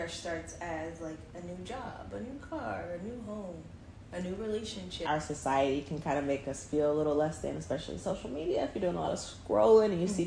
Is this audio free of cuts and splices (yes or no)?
no